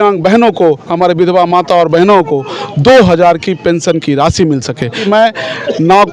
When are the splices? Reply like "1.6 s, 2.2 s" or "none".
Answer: 4.9 s